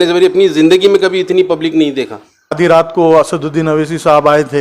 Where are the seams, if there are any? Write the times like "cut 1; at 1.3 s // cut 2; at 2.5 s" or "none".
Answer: cut 1; at 2.6 s